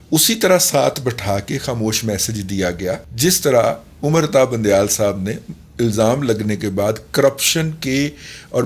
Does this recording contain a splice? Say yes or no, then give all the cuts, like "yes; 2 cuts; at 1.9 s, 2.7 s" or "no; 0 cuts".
yes; 1 cut; at 3.1 s